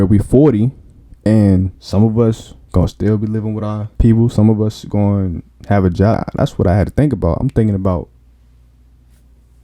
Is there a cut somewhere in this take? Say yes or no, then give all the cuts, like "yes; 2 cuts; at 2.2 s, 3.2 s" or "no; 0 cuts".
yes; 4 cuts; at 1.8 s, 2.5 s, 3.9 s, 6.2 s